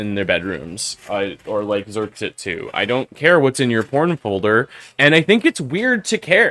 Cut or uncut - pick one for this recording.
uncut